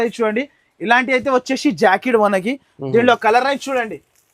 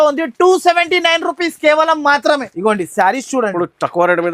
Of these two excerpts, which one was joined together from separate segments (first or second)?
second